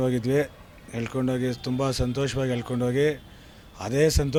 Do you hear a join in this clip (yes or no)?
no